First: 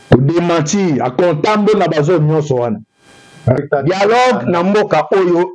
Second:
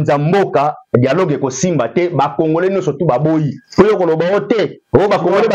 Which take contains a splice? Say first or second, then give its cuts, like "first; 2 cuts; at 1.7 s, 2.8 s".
first; 1 cut; at 3.6 s